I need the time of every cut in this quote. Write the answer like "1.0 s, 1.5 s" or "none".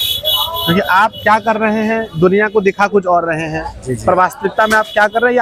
none